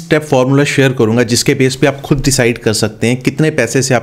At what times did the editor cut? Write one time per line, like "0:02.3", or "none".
none